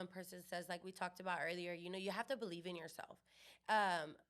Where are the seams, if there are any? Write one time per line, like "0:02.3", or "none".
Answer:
none